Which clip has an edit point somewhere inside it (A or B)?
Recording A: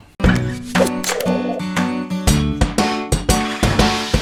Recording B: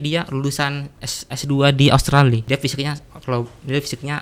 B